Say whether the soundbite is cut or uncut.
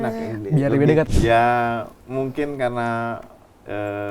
cut